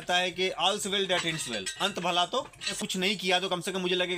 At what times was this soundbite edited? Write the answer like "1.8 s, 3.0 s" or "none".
2.7 s